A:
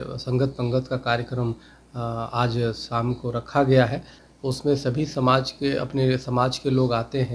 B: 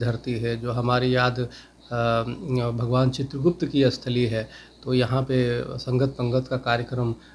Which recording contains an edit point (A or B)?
A